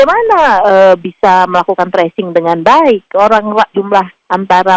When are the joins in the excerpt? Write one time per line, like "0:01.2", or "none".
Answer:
none